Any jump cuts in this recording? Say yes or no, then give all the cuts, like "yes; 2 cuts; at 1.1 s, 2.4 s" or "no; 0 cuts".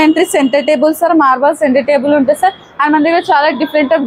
no; 0 cuts